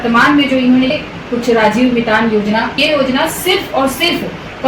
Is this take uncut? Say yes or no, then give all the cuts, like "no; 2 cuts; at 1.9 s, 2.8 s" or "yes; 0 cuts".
no; 2 cuts; at 0.9 s, 2.8 s